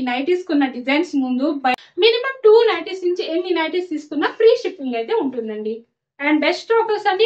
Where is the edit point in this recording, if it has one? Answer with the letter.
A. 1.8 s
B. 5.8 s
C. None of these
A